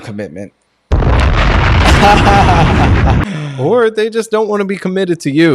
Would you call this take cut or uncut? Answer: cut